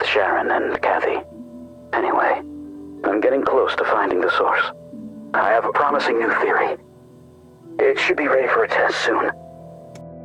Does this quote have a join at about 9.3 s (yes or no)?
yes